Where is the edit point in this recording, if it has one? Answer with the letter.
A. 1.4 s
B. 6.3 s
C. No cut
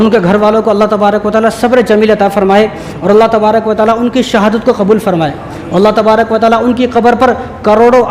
C